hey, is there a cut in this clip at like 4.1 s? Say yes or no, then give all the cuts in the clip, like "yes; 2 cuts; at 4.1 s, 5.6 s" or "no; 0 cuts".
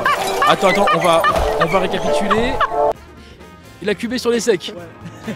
no; 0 cuts